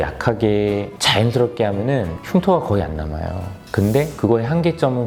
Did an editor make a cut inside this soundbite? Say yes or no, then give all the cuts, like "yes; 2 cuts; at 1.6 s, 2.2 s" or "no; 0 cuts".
no; 0 cuts